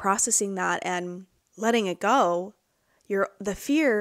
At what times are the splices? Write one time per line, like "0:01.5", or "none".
none